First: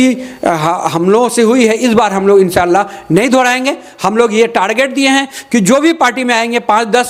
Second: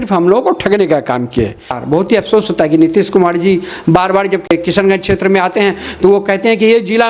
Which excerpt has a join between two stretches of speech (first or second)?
second